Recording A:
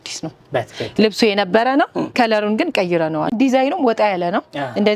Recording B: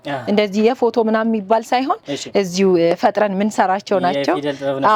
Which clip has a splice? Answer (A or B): A